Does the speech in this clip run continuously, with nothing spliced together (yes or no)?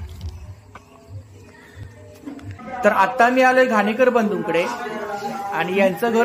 no